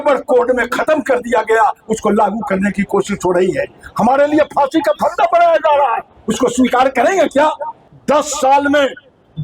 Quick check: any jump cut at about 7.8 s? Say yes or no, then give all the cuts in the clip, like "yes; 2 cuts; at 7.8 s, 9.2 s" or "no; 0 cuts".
yes; 1 cut; at 7.8 s